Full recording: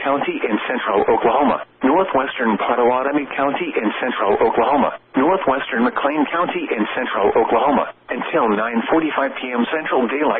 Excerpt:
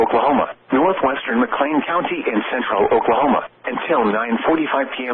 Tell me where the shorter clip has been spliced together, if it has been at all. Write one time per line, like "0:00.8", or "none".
0:01.1